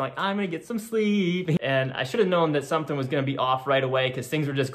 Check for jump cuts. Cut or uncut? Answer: cut